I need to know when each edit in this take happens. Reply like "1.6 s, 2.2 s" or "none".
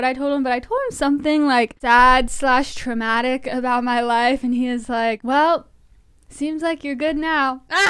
1.8 s, 5.2 s